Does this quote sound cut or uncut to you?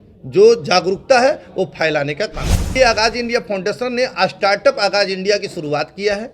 cut